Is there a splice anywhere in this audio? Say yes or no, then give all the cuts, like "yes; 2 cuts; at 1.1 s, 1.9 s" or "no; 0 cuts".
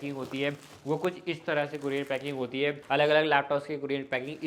yes; 1 cut; at 2.8 s